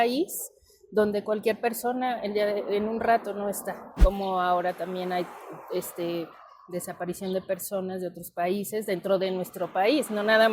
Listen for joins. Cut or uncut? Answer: cut